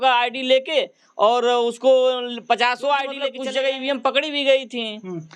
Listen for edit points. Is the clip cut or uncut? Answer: cut